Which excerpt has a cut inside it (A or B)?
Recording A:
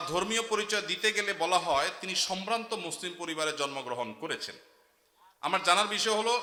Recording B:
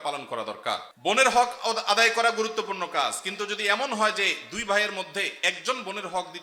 B